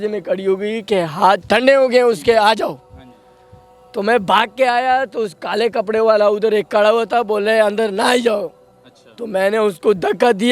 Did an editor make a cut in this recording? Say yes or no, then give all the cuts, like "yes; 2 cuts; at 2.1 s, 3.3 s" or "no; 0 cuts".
no; 0 cuts